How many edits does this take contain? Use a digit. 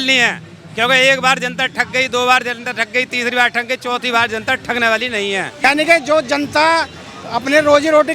1